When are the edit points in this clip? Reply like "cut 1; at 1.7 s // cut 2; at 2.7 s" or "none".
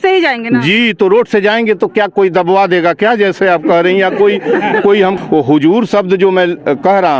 cut 1; at 5.2 s